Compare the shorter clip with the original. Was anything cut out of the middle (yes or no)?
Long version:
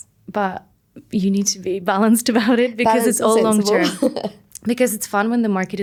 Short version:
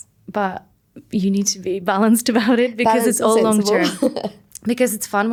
no